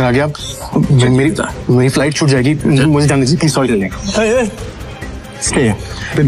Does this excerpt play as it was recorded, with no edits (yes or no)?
yes